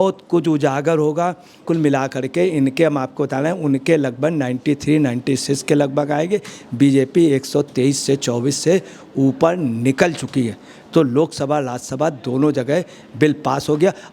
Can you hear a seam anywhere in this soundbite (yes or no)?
yes